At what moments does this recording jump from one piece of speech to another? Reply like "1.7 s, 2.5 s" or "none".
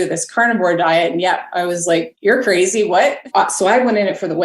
2.1 s, 3.3 s